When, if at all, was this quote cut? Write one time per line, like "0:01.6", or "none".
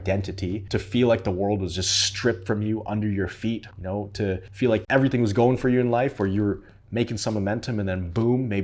none